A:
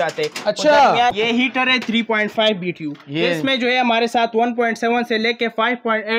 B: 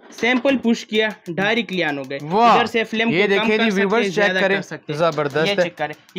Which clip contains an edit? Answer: A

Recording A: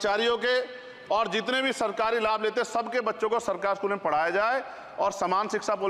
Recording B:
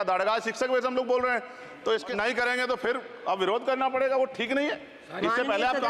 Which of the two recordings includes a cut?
B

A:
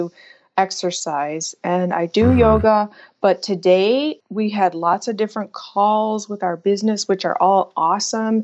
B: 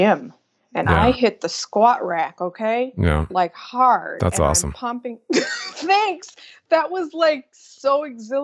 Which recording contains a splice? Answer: A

